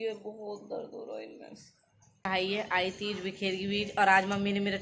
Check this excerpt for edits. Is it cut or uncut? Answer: cut